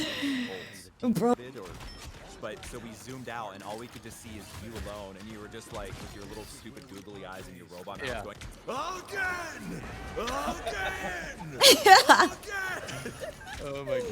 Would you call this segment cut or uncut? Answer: cut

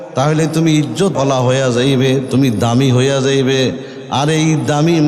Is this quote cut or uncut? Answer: cut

